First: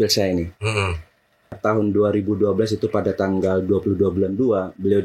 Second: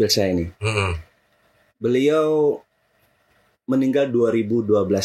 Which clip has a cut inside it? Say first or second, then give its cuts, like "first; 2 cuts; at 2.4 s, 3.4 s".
first; 1 cut; at 1.6 s